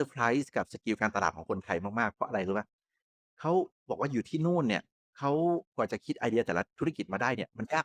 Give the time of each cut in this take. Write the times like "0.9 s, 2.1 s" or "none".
none

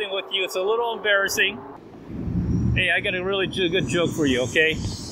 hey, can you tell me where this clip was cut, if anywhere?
1.7 s

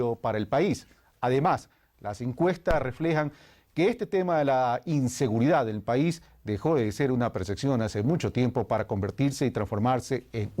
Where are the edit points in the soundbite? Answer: 8.0 s

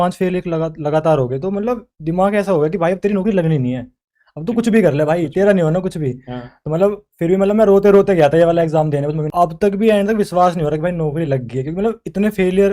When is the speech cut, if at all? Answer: 9.2 s

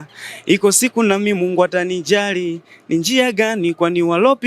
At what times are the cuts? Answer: none

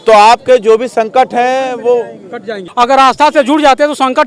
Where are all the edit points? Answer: 2.6 s

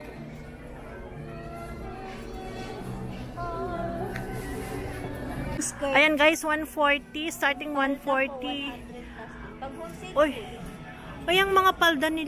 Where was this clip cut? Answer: 5.6 s

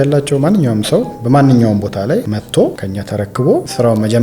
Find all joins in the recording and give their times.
2.3 s, 3.3 s

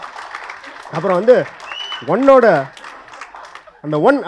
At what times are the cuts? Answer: none

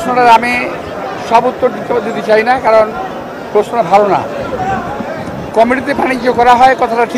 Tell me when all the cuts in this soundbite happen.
none

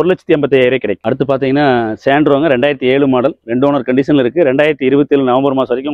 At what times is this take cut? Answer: none

